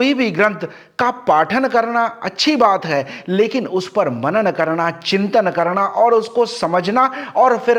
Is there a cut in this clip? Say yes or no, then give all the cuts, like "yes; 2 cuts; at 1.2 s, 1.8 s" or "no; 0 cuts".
no; 0 cuts